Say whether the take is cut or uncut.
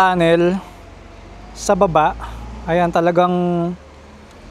uncut